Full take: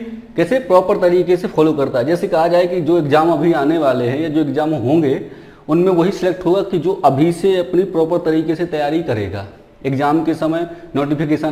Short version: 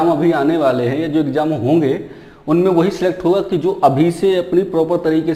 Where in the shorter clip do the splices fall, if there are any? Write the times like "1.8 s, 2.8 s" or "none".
none